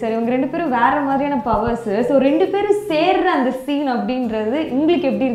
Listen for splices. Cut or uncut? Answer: uncut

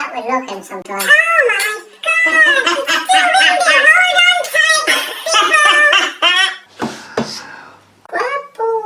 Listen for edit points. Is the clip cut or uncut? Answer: uncut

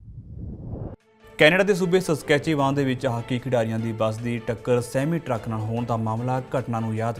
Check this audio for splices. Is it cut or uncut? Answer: cut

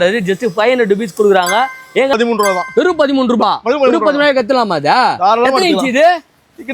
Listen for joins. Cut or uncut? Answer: cut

